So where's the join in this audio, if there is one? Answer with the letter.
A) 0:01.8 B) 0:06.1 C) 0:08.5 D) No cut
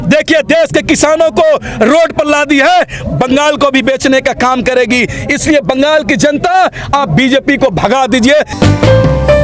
C